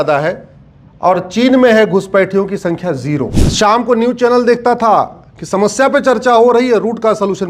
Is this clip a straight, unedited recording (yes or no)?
no